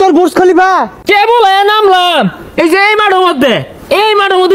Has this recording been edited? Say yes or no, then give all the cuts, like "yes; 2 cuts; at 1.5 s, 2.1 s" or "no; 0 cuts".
yes; 1 cut; at 0.9 s